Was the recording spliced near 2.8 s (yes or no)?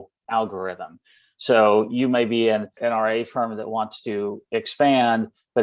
yes